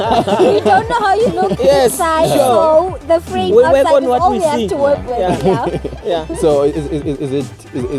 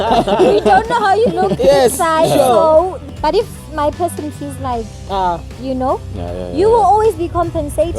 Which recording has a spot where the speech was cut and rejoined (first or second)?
second